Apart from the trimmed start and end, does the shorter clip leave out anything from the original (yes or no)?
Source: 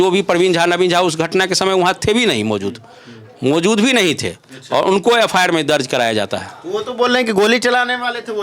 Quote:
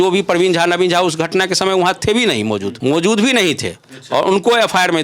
yes